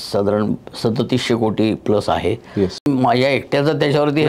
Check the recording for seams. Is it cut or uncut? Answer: cut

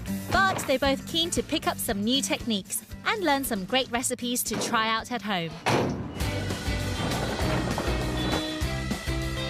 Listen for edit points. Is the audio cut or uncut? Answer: cut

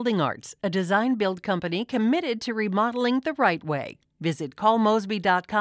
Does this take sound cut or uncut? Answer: uncut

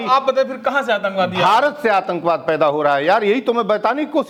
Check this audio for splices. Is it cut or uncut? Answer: uncut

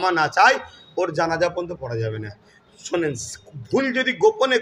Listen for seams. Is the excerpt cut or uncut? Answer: uncut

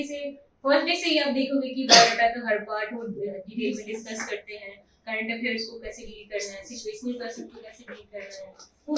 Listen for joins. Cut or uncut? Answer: uncut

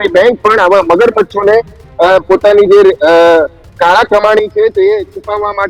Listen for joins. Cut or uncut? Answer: uncut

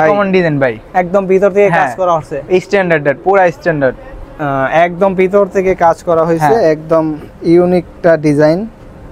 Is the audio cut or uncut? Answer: uncut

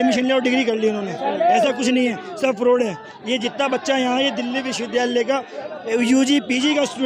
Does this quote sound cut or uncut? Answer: uncut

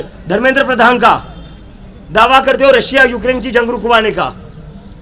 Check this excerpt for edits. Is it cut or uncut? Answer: uncut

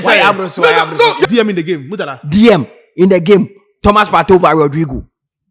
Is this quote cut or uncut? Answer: cut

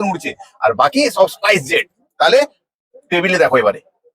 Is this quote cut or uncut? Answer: uncut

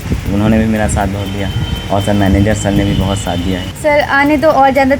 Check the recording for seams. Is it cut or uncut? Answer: cut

